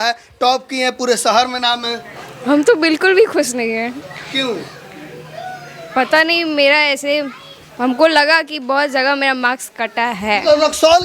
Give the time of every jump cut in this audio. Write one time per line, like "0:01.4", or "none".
none